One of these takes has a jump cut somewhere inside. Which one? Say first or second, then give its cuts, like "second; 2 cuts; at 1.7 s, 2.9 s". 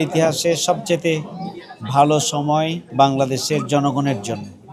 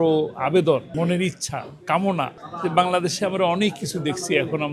first; 1 cut; at 2.8 s